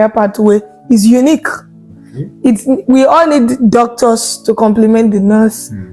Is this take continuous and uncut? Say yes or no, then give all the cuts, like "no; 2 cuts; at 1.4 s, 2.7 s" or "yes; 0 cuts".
yes; 0 cuts